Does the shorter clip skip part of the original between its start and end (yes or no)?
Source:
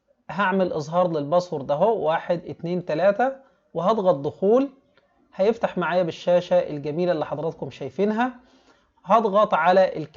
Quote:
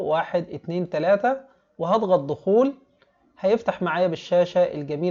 no